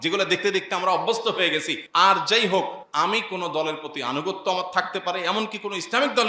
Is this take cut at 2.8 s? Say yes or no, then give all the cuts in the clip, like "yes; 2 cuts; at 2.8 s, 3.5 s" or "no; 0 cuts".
yes; 2 cuts; at 1.8 s, 2.8 s